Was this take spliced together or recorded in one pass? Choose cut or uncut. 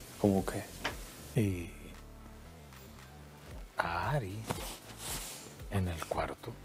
cut